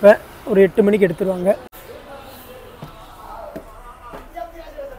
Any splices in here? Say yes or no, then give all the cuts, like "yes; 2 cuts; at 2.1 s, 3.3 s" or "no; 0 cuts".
yes; 1 cut; at 1.7 s